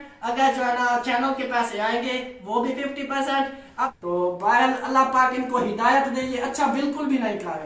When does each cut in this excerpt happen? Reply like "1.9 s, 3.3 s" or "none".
3.8 s